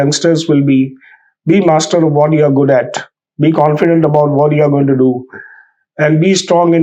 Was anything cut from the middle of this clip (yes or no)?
no